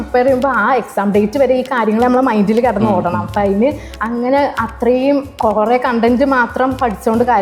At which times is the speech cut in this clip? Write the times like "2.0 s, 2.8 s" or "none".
none